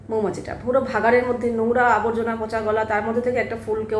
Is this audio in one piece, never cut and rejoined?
yes; 0 cuts

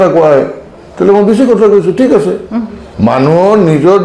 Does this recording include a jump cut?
no; 0 cuts

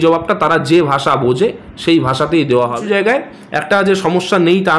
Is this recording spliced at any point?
yes; 1 cut; at 2.8 s

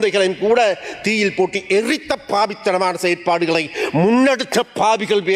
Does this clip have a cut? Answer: no; 0 cuts

